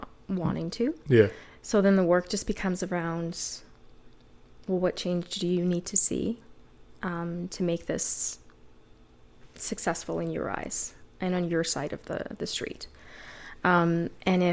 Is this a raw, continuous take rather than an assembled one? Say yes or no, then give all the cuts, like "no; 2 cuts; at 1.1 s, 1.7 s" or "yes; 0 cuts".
yes; 0 cuts